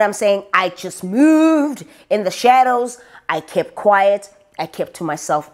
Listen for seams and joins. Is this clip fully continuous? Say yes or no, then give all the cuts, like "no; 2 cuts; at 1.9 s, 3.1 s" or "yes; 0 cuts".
yes; 0 cuts